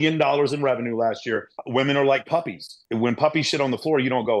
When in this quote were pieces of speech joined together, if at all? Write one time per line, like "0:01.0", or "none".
0:01.5
0:02.8